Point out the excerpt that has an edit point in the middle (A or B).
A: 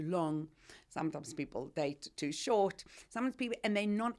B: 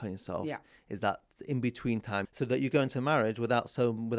B